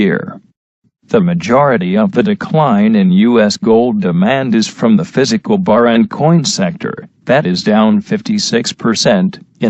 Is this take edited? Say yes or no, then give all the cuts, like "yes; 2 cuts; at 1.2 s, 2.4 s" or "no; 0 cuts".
no; 0 cuts